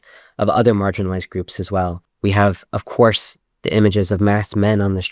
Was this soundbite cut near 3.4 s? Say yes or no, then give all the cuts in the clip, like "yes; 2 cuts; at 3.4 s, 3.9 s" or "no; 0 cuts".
no; 1 cut; at 2.1 s